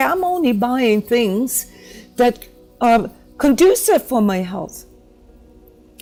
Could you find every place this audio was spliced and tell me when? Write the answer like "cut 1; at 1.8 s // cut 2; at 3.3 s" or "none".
none